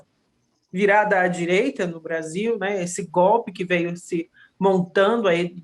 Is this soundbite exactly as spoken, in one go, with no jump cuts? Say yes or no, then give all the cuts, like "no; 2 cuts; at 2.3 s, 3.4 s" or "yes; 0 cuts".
yes; 0 cuts